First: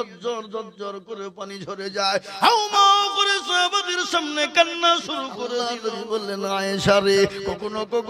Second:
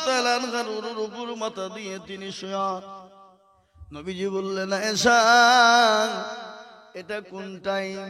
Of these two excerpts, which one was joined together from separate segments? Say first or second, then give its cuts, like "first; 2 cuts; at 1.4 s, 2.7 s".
first; 1 cut; at 5.7 s